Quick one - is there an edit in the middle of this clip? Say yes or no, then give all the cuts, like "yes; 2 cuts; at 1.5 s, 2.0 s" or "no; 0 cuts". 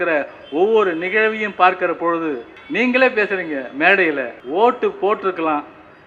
yes; 2 cuts; at 2.5 s, 4.4 s